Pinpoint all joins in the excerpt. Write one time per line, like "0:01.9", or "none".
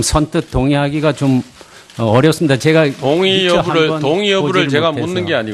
0:02.4